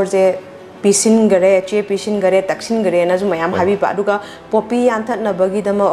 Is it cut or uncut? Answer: uncut